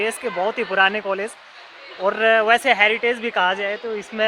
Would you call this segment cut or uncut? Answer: uncut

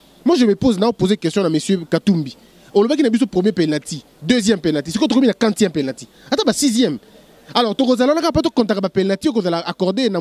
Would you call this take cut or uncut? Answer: uncut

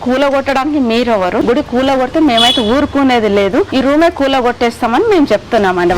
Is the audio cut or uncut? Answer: cut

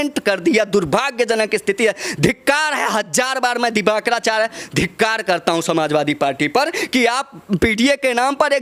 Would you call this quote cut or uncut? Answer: uncut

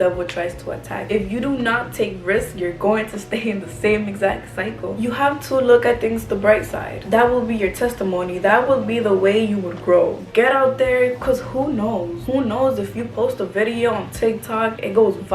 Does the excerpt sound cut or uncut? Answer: cut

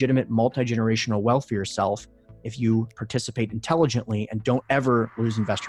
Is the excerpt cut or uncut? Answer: uncut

